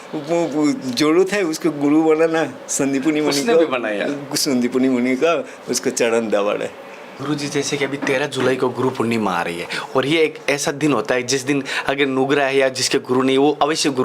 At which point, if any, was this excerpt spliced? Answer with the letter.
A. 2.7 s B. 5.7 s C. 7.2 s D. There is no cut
C